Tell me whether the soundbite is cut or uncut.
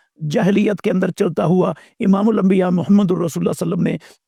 uncut